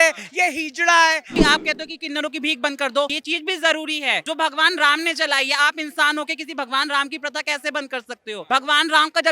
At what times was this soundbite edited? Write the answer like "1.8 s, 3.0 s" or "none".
1.4 s, 3.2 s, 4.2 s, 8.4 s